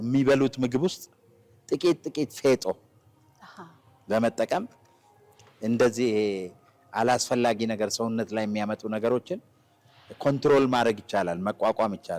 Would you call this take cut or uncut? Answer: uncut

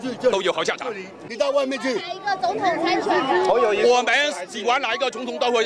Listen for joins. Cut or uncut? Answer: cut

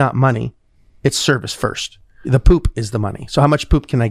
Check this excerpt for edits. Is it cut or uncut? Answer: cut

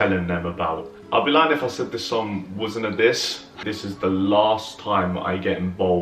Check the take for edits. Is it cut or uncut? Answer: cut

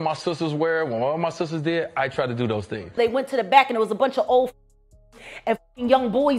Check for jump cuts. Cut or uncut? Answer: cut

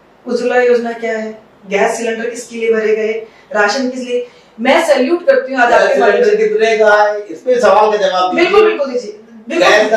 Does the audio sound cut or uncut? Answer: uncut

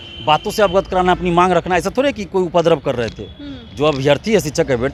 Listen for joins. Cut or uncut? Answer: uncut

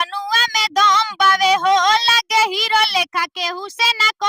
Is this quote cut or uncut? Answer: uncut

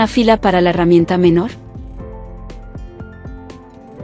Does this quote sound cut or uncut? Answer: cut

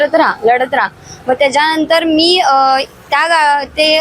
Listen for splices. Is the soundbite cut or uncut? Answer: uncut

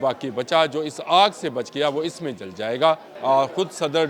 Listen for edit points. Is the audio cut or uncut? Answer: cut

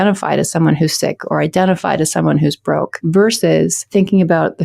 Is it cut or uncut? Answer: cut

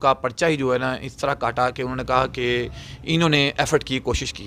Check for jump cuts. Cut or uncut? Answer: uncut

